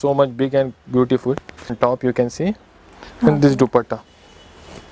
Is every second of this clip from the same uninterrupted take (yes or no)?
no